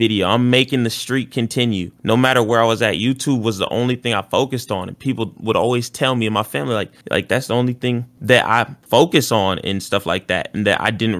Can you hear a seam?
no; 0 cuts

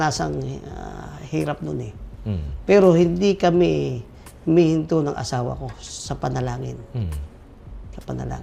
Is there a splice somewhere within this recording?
no; 0 cuts

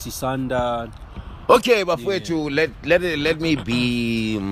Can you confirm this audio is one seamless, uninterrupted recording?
yes; 0 cuts

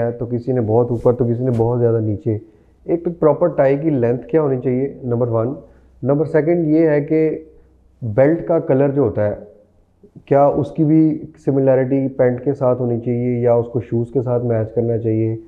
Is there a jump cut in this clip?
no; 0 cuts

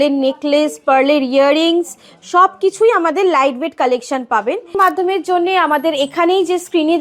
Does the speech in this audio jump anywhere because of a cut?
yes; 1 cut; at 4.7 s

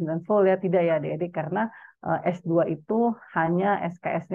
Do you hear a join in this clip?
no; 0 cuts

